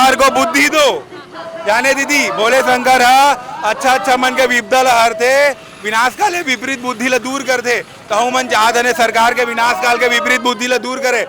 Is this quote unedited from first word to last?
yes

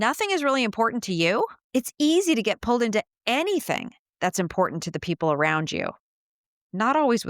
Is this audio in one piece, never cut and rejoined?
no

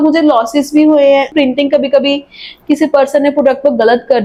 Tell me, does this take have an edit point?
no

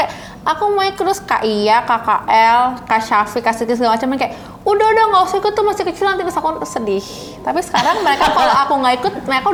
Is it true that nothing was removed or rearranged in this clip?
yes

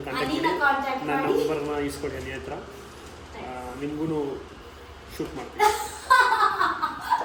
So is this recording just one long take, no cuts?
yes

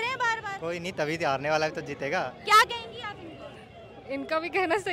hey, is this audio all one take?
yes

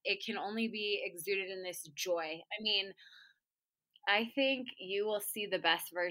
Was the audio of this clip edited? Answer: yes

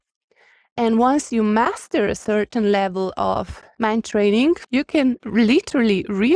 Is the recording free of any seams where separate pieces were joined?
no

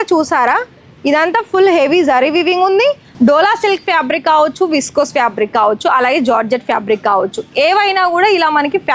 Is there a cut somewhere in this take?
yes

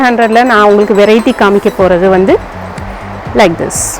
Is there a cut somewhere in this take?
no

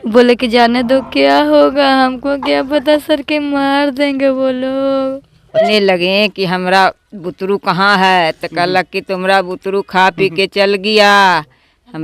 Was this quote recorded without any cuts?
no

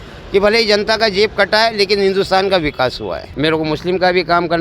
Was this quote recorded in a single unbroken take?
no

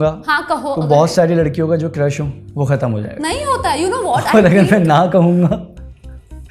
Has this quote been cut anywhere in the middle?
no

